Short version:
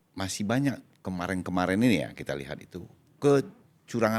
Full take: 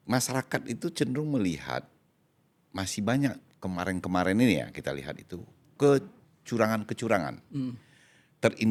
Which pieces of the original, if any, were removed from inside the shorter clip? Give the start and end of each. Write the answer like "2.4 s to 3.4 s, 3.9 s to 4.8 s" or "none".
none

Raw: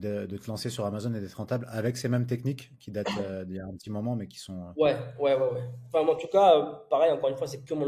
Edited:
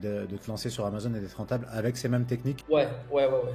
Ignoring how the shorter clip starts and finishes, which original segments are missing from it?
2.6 s to 4.7 s

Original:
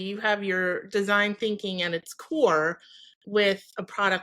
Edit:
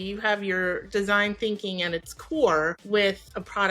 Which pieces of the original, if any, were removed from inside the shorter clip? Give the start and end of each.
2.8 s to 3.2 s

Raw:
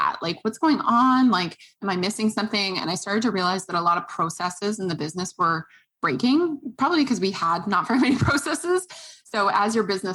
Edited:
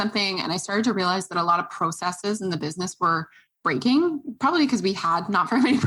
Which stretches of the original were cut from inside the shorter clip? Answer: none

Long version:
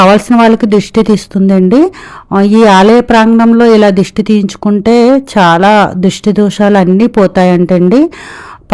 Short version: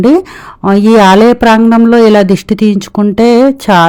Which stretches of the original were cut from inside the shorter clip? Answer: none

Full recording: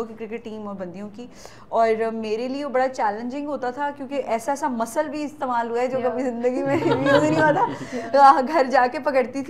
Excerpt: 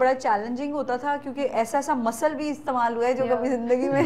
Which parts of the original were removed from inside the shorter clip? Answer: none

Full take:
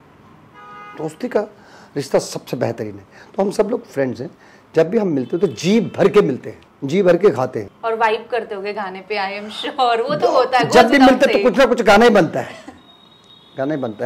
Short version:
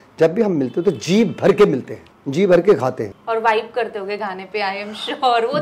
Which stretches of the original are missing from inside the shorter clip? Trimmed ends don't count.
none

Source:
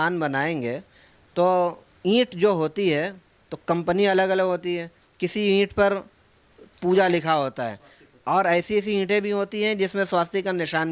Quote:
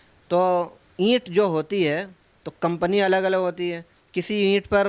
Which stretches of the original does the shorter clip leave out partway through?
none

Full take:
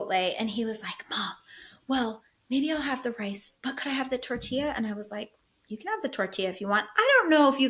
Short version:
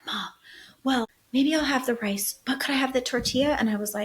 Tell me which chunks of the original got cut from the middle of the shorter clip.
2.2 s to 2.3 s

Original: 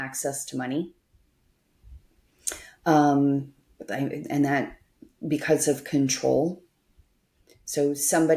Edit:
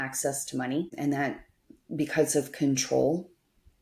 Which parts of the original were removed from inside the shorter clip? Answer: 0.9 s to 4.2 s

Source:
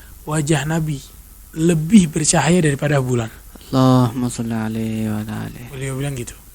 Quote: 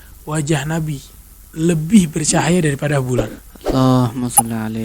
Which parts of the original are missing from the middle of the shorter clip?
none

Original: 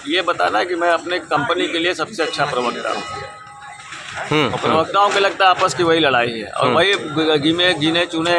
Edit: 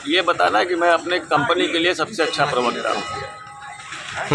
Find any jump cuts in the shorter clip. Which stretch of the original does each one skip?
none

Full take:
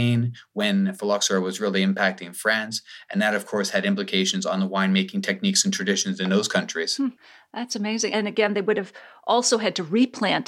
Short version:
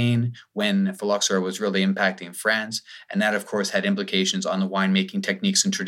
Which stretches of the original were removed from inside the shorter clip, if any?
none

